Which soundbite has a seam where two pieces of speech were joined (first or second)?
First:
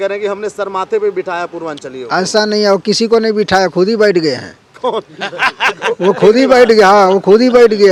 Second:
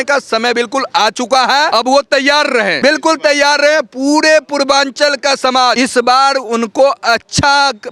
second